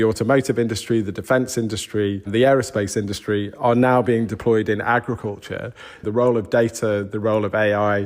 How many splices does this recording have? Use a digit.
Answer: 2